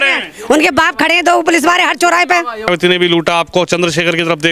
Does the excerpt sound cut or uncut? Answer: cut